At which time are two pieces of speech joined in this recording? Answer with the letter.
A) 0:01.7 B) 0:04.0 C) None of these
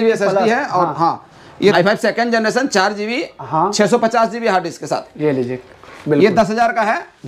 A